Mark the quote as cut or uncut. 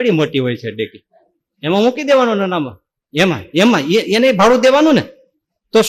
uncut